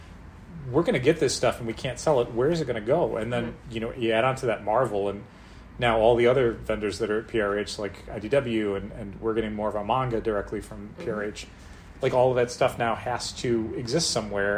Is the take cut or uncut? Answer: uncut